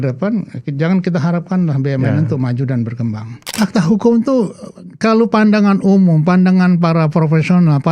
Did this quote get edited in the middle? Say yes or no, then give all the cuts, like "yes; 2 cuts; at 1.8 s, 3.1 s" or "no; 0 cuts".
yes; 1 cut; at 3.5 s